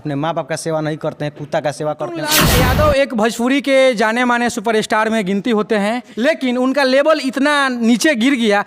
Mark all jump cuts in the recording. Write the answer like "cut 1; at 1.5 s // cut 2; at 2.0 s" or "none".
cut 1; at 2.4 s // cut 2; at 6.1 s

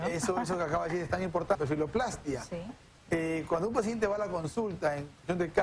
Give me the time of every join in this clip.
none

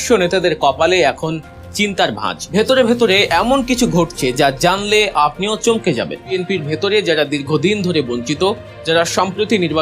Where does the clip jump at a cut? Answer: cut 1; at 2.3 s // cut 2; at 6.3 s

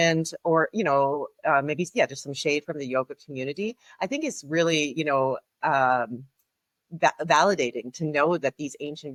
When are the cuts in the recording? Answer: none

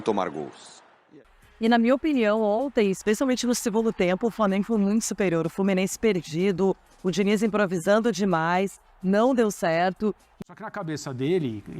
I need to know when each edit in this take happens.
cut 1; at 1.1 s // cut 2; at 10.3 s

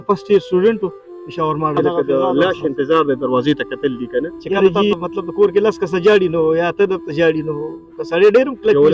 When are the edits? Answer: cut 1; at 1.7 s // cut 2; at 4.9 s

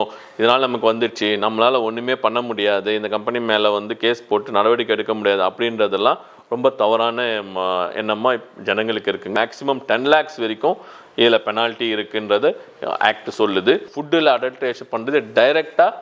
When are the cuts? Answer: cut 1; at 9.3 s // cut 2; at 13.9 s

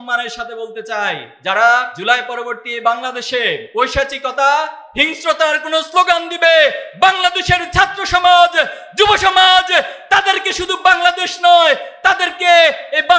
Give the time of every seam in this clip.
cut 1; at 1.3 s // cut 2; at 1.9 s // cut 3; at 3.6 s

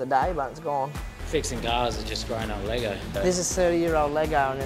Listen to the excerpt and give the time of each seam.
cut 1; at 1.1 s // cut 2; at 3.1 s

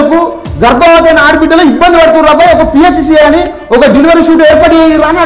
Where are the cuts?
none

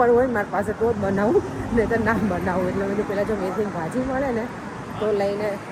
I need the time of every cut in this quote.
none

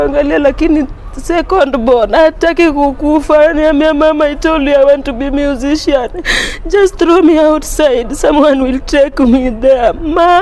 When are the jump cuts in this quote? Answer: none

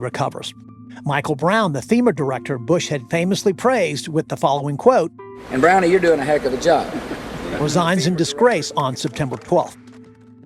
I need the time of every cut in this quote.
none

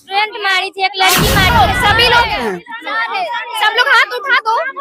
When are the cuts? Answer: cut 1; at 1.5 s

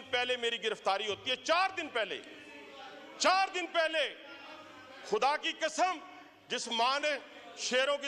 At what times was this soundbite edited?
none

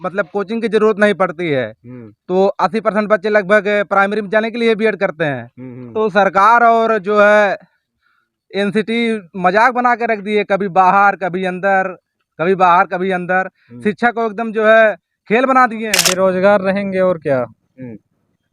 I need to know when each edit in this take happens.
cut 1; at 16.0 s

